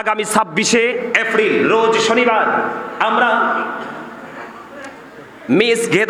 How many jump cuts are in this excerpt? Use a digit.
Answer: 0